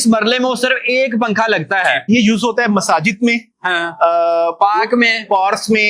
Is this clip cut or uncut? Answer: cut